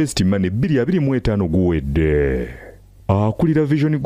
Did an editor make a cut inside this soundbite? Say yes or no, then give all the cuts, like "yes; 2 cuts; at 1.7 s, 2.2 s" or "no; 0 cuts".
no; 0 cuts